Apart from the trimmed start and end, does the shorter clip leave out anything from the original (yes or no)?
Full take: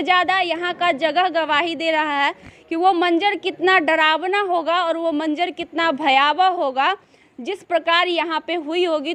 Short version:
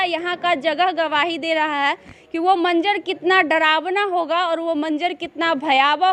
no